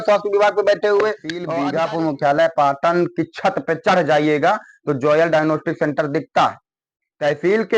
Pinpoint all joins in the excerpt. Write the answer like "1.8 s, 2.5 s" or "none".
1.4 s